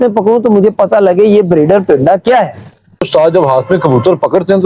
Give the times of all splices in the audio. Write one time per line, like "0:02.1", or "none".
0:03.0